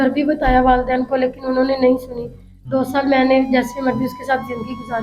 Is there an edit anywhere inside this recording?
no; 0 cuts

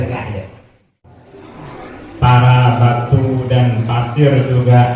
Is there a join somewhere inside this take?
yes; 1 cut; at 1.1 s

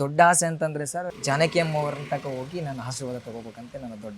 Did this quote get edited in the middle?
yes; 1 cut; at 1.1 s

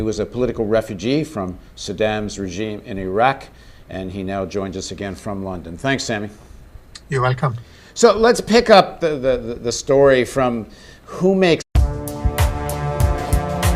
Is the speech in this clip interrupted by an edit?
no; 0 cuts

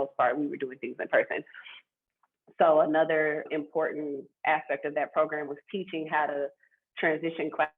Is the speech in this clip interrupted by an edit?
yes; 1 cut; at 3.5 s

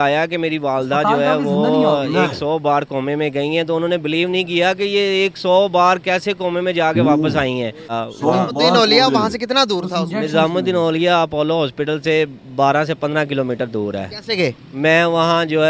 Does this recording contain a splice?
yes; 1 cut; at 7.9 s

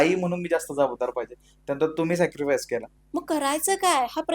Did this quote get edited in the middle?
yes; 1 cut; at 3.0 s

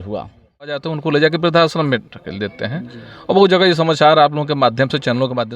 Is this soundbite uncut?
no; 1 cut; at 0.9 s

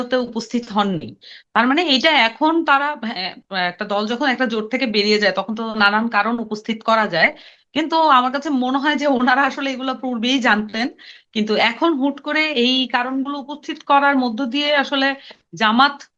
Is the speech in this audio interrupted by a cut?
no; 0 cuts

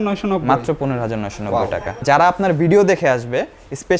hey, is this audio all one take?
no; 1 cut; at 2.0 s

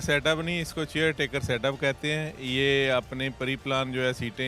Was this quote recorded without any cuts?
yes; 0 cuts

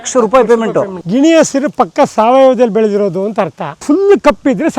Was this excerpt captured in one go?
no; 2 cuts; at 1.0 s, 3.8 s

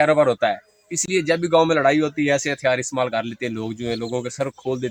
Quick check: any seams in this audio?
no; 0 cuts

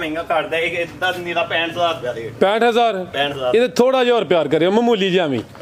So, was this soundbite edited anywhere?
no; 0 cuts

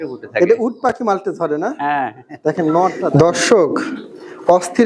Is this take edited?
yes; 1 cut; at 3.1 s

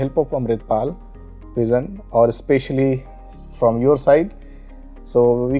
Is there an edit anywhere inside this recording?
no; 0 cuts

